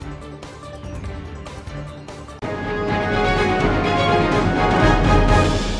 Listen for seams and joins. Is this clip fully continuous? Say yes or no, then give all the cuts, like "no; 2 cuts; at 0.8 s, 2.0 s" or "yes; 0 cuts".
yes; 0 cuts